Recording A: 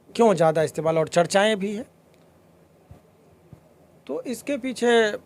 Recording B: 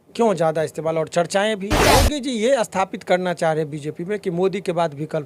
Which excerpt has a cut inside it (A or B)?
B